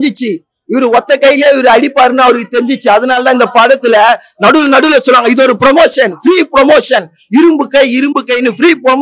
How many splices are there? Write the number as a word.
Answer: zero